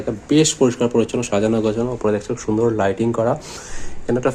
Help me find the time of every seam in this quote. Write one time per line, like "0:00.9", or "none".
none